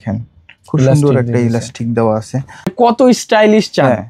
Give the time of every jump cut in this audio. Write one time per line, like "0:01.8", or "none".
0:02.7